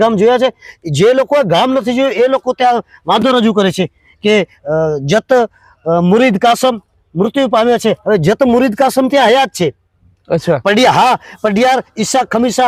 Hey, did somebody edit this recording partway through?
no; 0 cuts

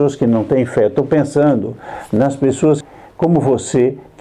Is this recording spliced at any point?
yes; 1 cut; at 2.8 s

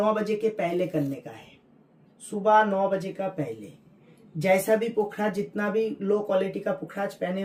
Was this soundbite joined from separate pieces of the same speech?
no; 0 cuts

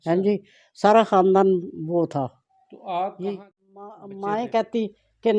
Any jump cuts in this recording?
yes; 1 cut; at 4.1 s

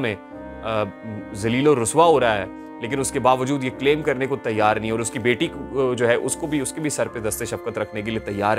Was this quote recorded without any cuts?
yes; 0 cuts

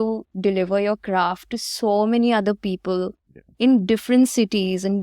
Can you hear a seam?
no; 0 cuts

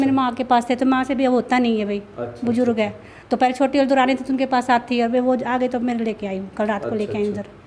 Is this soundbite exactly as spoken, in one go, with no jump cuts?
yes; 0 cuts

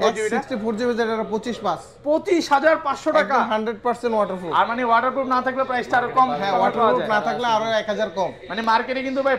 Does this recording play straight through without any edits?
yes; 0 cuts

